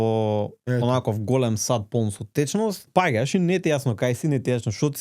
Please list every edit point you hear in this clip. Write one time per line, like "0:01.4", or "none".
0:02.9